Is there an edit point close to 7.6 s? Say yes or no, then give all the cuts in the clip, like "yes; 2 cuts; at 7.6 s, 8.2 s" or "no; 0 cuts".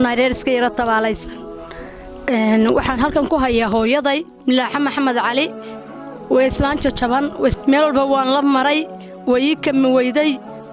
yes; 1 cut; at 7.6 s